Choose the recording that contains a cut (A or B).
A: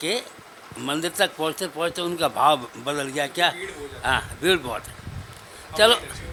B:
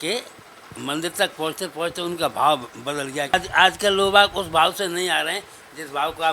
B